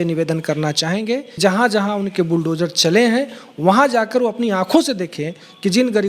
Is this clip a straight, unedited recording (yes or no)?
no